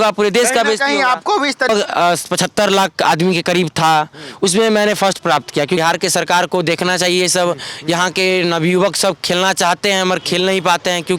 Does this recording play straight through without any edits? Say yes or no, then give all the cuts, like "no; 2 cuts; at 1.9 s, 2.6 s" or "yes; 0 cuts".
no; 2 cuts; at 1.7 s, 5.8 s